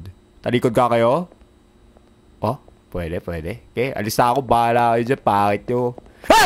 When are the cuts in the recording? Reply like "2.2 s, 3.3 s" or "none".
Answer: none